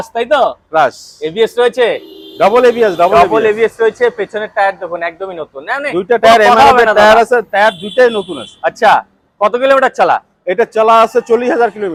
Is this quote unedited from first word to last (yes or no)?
yes